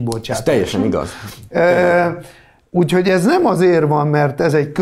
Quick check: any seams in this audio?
no; 0 cuts

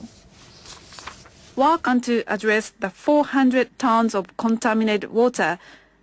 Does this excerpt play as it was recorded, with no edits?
yes; 0 cuts

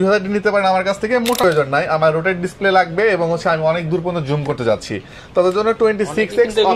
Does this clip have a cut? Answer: yes; 1 cut; at 1.4 s

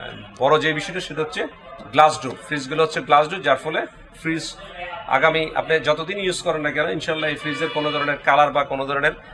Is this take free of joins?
yes; 0 cuts

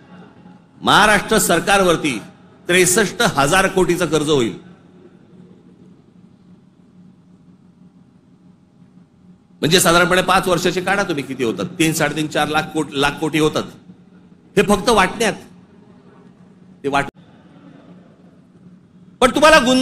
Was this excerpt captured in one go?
no; 1 cut; at 17.0 s

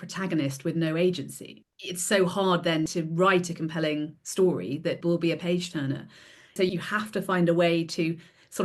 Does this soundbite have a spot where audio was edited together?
yes; 4 cuts; at 1.5 s, 2.9 s, 5.0 s, 6.6 s

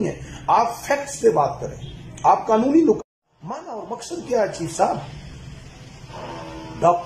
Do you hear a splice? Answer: yes; 1 cut; at 3.0 s

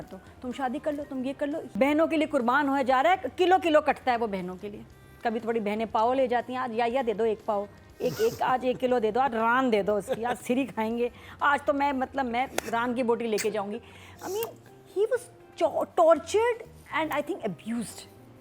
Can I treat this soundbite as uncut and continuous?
no; 1 cut; at 1.6 s

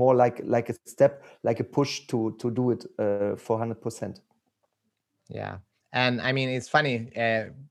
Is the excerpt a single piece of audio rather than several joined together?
yes; 0 cuts

